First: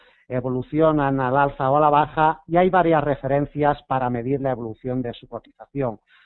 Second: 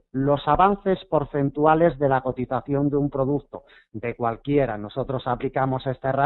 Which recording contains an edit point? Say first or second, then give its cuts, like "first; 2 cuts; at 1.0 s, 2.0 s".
second; 1 cut; at 2.5 s